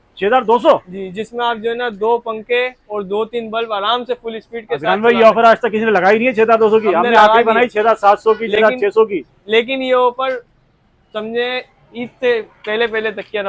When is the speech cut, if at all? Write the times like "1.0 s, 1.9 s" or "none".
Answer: none

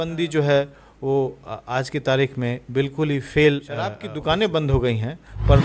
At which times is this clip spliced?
4.1 s

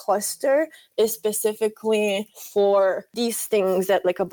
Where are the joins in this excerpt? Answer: 2.4 s, 3.1 s

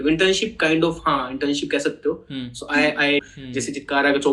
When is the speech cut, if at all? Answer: 3.3 s

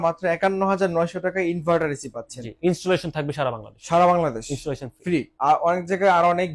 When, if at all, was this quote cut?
5.3 s

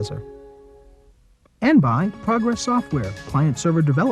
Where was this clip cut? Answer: 1.6 s

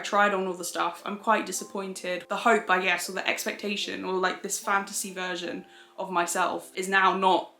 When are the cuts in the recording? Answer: 2.2 s

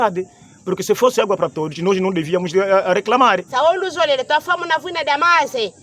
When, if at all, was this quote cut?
3.5 s

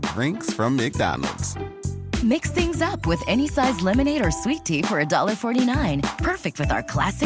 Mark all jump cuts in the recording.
none

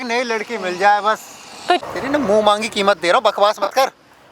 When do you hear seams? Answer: 1.8 s

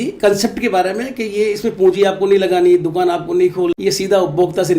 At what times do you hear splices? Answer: 3.7 s

